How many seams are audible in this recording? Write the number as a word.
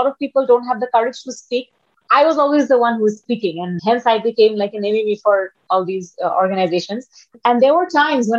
two